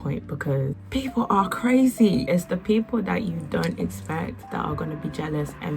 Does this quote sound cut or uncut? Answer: cut